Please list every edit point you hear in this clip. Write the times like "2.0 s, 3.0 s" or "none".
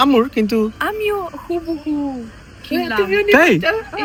none